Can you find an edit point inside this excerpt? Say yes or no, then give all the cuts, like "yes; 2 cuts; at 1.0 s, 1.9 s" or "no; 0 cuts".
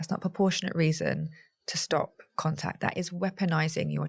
no; 0 cuts